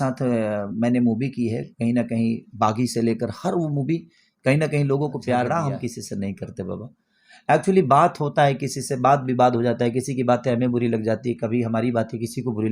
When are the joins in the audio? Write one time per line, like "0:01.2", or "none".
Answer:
0:05.5